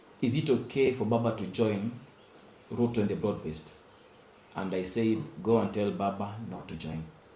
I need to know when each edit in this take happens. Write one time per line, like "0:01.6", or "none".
none